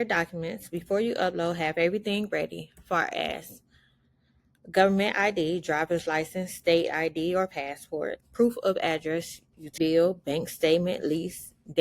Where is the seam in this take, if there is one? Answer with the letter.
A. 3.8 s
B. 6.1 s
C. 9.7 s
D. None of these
C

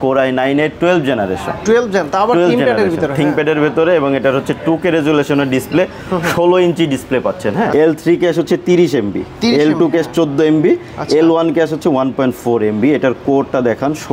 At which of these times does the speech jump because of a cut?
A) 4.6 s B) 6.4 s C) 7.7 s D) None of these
C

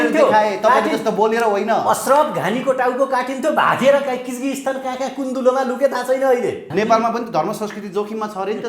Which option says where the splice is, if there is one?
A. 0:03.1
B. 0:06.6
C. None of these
B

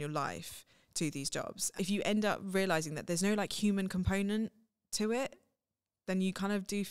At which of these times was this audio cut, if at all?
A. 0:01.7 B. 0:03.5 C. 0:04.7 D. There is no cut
A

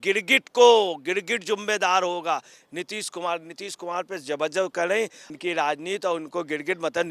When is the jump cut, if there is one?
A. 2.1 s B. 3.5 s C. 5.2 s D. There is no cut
C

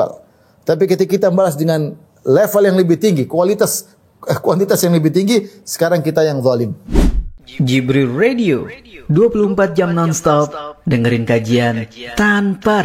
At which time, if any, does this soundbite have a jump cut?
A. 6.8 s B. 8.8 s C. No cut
A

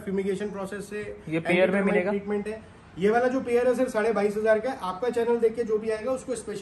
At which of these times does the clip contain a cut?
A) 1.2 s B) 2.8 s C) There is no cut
C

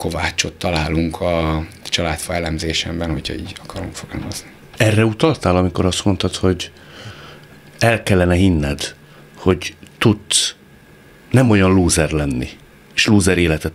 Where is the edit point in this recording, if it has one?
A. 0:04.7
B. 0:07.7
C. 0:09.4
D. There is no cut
A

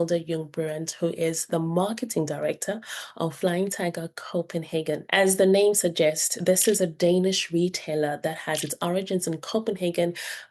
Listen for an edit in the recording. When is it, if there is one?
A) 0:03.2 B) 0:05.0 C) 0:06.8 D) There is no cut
B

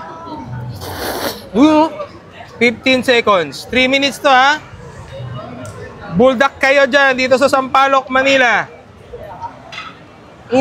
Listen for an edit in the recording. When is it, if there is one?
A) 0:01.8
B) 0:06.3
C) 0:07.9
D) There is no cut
D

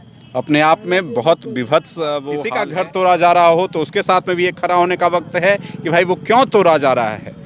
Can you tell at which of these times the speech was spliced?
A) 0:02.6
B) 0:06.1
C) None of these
A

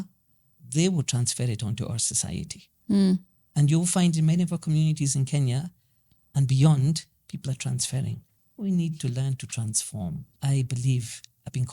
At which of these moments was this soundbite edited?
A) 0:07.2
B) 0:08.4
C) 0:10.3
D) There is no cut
C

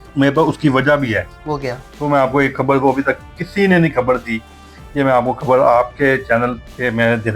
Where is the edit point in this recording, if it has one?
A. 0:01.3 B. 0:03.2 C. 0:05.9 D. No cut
A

